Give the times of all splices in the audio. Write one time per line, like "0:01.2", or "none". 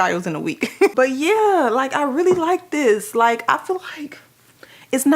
0:00.9

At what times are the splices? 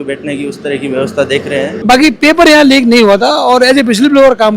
0:01.8

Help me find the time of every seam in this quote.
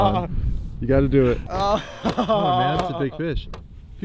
0:01.4

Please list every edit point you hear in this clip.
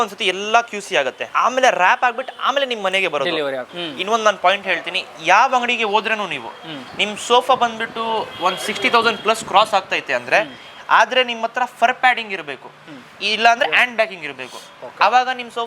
0:01.2
0:03.7

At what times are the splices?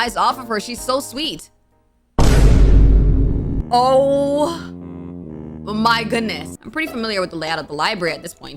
0:03.6
0:06.6

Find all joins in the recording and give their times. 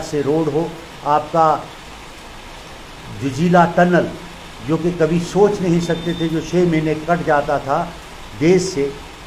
none

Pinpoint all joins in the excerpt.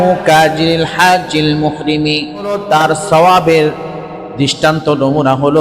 0:02.6

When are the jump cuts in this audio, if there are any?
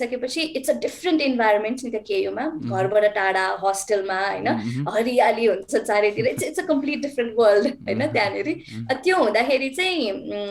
none

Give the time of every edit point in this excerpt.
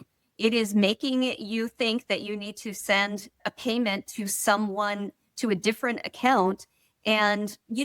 none

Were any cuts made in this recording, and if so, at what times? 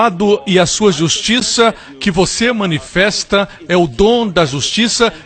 0:01.6

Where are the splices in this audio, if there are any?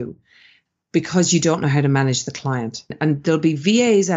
0:02.9

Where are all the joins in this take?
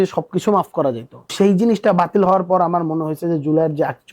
0:01.2

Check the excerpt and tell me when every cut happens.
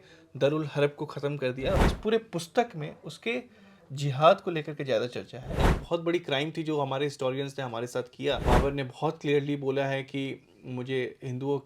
0:01.8
0:05.7
0:08.4

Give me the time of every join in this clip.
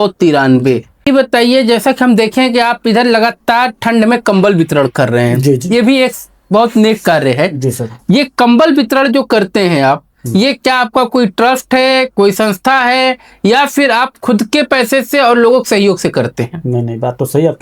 0:01.1

